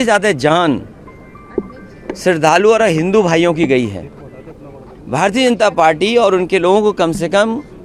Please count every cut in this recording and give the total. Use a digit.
0